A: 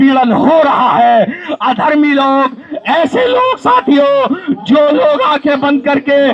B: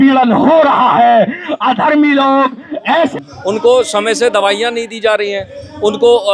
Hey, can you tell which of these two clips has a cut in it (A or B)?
B